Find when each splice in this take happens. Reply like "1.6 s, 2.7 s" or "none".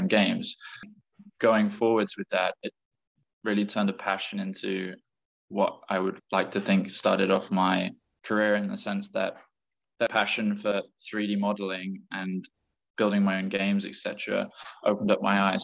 0.9 s